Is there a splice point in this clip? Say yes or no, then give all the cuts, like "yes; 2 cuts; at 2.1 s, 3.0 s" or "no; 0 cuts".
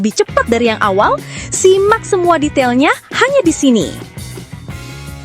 yes; 1 cut; at 4.0 s